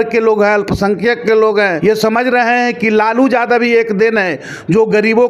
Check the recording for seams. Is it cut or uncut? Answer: cut